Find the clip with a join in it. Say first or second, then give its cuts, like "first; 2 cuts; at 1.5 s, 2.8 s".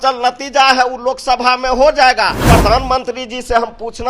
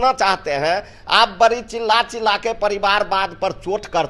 first; 1 cut; at 2.5 s